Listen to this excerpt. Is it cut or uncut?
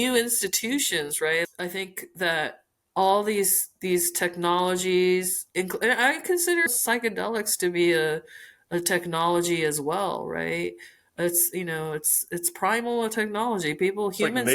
cut